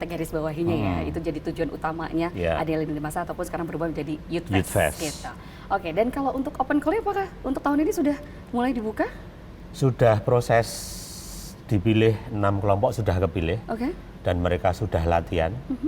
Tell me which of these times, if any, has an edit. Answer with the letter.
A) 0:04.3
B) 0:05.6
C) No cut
C